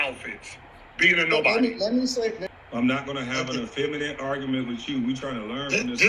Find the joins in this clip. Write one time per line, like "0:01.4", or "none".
0:02.4